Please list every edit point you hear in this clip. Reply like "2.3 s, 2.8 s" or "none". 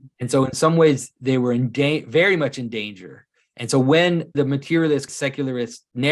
4.3 s, 5.3 s